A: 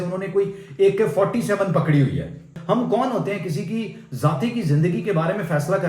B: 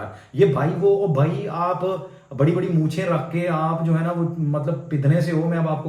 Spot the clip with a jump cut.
A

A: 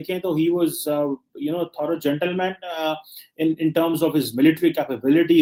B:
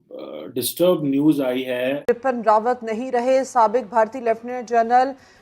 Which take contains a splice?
B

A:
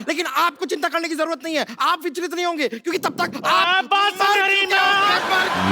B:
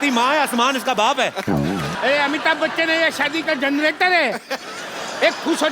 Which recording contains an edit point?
B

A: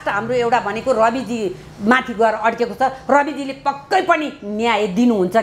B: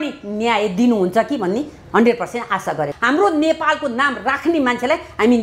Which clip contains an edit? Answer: B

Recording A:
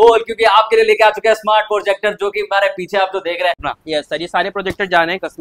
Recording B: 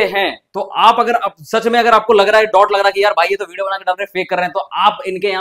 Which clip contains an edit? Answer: A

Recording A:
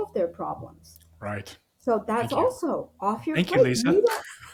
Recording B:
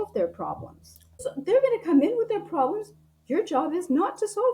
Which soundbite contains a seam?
B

